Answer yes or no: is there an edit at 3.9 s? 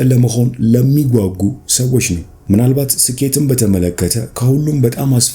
no